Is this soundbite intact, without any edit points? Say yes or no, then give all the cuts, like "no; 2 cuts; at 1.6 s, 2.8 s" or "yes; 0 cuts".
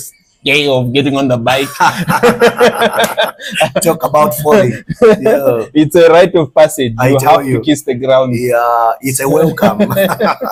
yes; 0 cuts